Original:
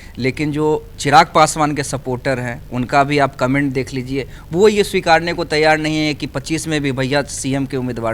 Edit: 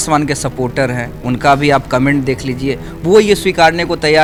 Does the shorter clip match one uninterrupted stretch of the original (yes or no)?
yes